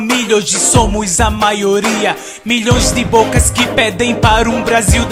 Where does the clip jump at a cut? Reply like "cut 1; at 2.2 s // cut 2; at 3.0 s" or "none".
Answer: none